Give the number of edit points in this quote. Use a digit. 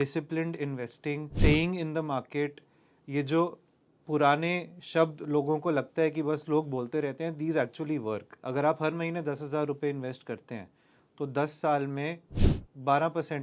2